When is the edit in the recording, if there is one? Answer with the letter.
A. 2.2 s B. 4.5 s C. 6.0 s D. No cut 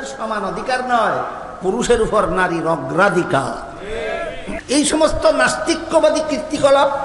B